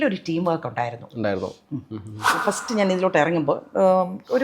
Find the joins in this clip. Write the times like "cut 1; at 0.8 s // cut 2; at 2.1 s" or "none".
cut 1; at 2.3 s

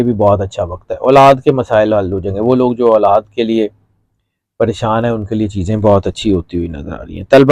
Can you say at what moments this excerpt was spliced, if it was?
none

